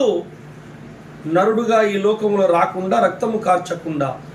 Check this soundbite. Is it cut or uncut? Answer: uncut